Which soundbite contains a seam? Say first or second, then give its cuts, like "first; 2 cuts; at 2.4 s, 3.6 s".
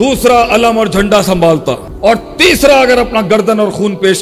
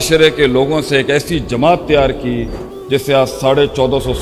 first; 1 cut; at 1.9 s